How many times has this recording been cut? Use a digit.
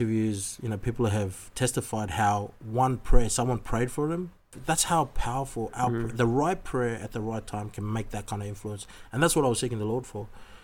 1